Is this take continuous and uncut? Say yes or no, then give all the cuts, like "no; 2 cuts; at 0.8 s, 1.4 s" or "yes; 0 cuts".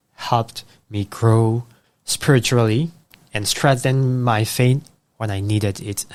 yes; 0 cuts